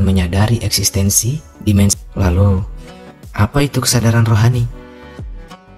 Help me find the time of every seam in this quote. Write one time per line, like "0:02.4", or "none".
0:02.0